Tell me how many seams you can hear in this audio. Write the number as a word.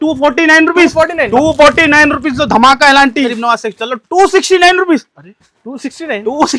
one